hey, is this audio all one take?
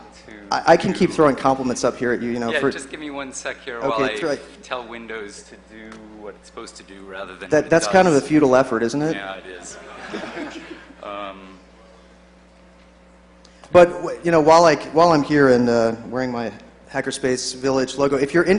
no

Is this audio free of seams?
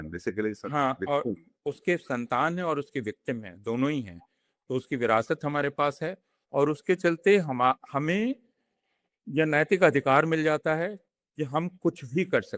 yes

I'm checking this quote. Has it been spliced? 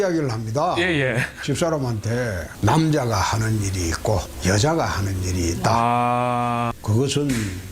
yes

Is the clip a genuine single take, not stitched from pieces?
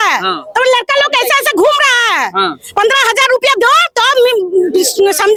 yes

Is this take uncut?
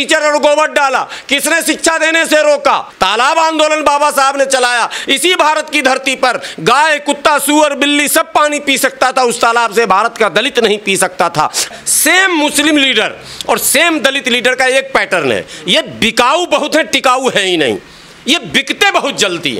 no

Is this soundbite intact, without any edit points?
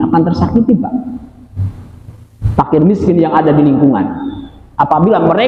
yes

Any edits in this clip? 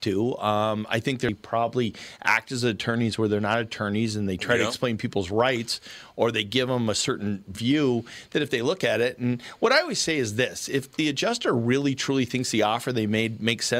yes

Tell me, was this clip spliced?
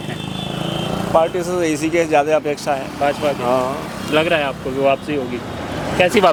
no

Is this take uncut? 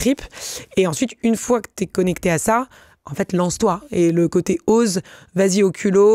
yes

